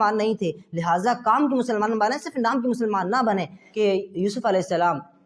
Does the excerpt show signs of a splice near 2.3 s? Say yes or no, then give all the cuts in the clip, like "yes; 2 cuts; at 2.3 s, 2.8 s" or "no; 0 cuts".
no; 1 cut; at 3.6 s